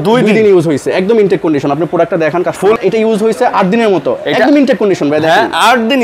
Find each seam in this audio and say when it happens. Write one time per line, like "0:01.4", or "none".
0:02.8